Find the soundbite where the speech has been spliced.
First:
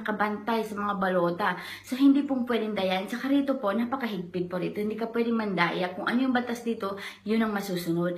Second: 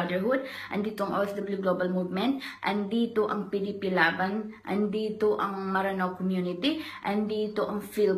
second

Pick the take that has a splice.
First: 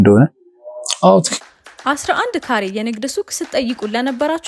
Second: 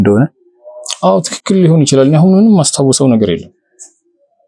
first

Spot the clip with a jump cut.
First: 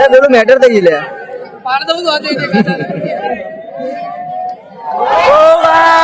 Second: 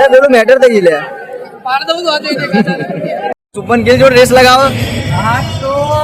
second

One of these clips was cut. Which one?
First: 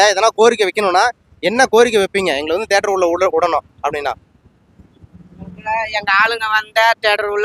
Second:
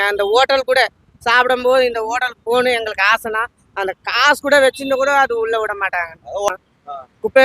second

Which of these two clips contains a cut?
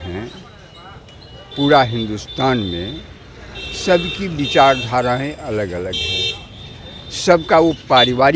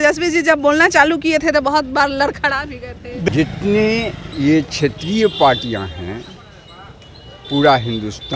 second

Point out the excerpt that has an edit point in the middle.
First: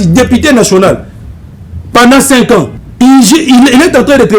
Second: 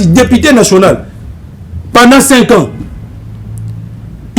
first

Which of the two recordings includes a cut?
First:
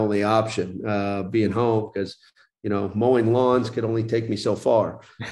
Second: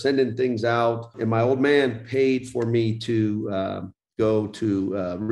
second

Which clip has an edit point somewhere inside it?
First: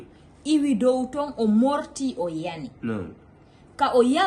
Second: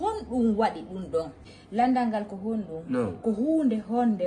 second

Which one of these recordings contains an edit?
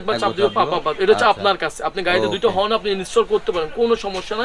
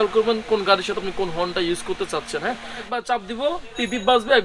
second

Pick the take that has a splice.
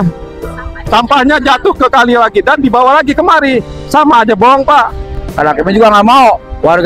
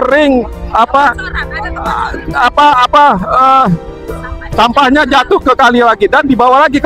first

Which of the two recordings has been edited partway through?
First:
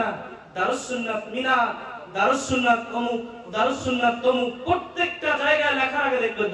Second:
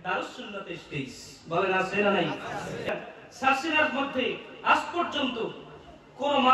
second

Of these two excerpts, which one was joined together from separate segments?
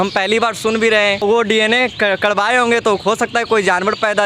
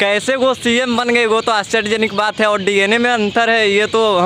first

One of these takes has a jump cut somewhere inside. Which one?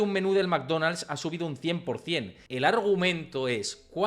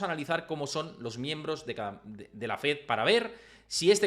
first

